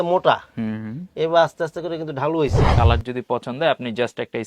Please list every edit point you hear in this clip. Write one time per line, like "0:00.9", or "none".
0:02.7